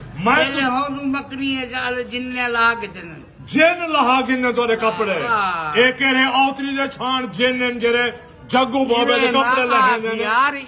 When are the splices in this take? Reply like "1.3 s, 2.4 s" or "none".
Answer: none

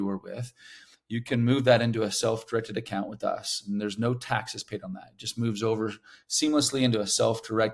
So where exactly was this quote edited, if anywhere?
none

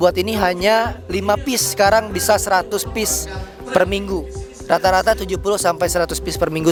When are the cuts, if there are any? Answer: none

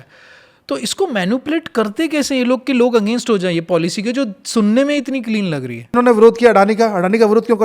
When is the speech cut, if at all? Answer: 6.0 s

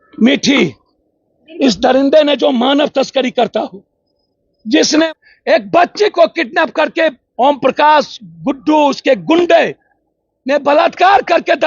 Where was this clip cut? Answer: 5.0 s

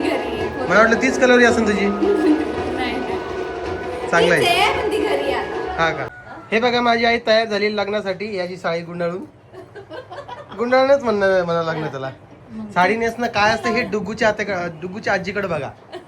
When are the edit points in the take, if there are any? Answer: 6.0 s

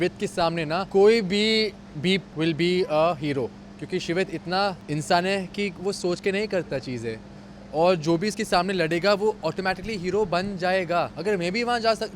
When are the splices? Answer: 0.9 s, 2.3 s, 4.8 s, 11.1 s

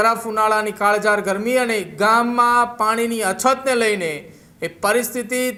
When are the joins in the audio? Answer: none

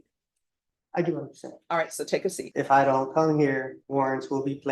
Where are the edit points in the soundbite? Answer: 2.4 s, 3.8 s

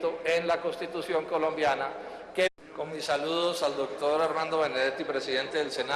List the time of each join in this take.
none

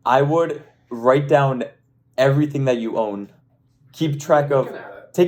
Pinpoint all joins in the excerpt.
none

